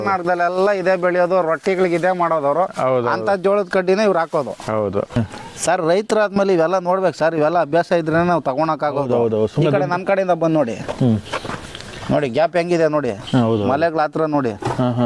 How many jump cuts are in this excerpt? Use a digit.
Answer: 1